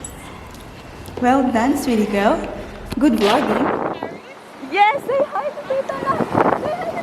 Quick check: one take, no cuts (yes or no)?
no